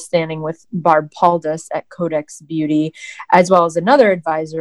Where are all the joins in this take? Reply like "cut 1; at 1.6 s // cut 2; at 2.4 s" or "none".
none